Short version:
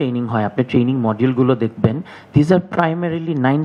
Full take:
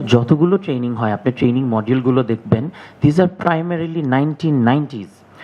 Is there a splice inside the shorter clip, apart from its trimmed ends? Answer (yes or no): no